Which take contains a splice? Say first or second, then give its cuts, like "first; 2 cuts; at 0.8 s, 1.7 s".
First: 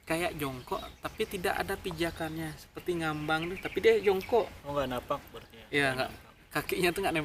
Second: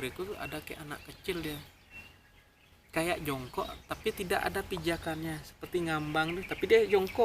second; 1 cut; at 1.6 s